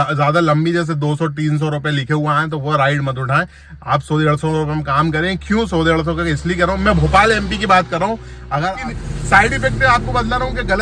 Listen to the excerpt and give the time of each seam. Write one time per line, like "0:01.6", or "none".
0:08.7

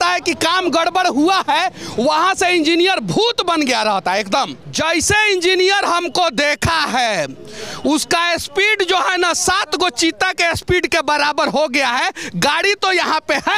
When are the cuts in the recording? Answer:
0:04.6

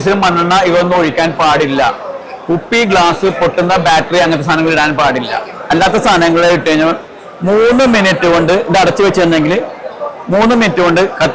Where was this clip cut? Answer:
none

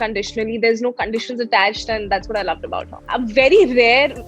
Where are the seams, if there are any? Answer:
0:02.9

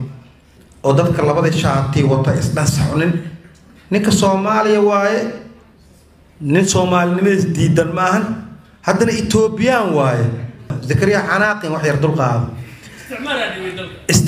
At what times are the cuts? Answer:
0:10.8

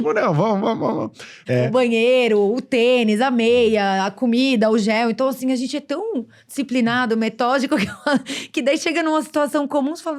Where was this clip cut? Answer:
0:01.3

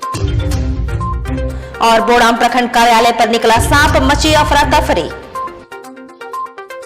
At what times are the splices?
0:01.4

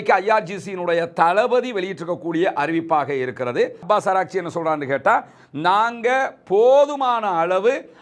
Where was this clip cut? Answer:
0:03.8

